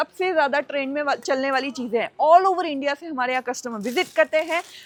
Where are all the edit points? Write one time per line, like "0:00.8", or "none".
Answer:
none